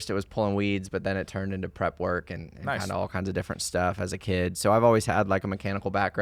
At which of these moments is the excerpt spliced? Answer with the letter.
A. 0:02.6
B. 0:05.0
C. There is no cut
C